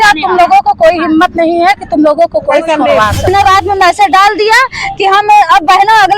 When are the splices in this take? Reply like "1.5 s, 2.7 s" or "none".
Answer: 3.3 s